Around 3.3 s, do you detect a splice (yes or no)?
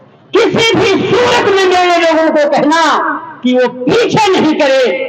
no